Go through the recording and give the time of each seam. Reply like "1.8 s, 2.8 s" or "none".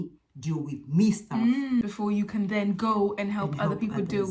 1.8 s